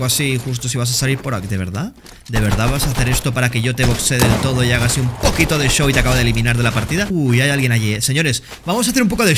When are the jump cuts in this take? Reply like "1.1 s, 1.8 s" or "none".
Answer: 7.1 s